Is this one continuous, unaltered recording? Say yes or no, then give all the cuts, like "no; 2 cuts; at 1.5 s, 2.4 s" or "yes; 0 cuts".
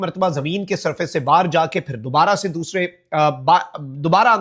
yes; 0 cuts